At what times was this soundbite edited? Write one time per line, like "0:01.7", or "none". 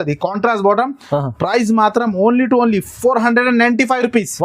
none